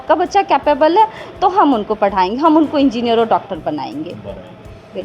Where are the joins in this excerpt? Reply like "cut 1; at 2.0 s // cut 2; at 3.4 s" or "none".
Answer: none